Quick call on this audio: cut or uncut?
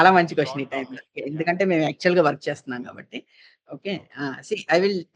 uncut